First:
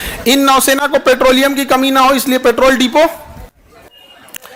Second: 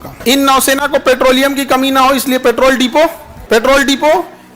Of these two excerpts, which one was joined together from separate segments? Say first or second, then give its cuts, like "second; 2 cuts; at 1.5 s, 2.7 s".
second; 1 cut; at 3.3 s